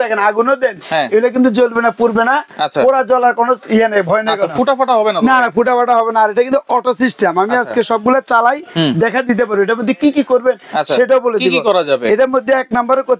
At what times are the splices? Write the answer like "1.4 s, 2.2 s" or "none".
none